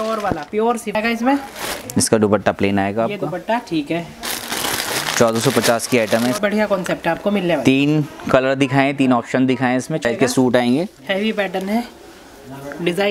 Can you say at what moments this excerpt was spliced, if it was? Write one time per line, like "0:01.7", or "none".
0:00.9
0:06.4
0:10.0